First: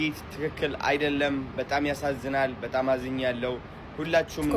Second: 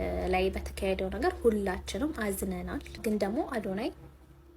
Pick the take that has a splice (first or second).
second